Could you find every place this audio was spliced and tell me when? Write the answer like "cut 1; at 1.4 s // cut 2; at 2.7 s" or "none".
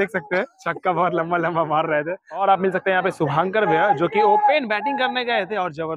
none